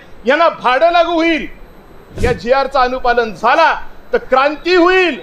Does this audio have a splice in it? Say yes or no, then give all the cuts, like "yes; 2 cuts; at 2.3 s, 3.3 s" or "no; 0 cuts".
yes; 1 cut; at 2.2 s